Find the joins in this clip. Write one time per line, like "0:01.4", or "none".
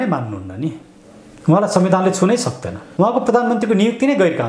0:02.8